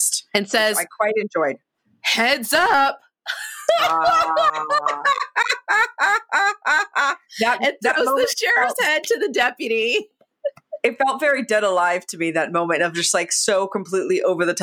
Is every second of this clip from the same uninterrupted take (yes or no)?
yes